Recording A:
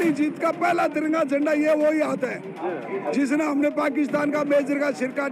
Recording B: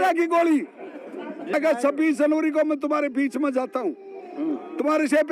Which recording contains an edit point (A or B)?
B